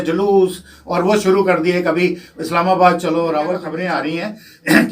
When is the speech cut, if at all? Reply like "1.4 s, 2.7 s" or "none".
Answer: 3.7 s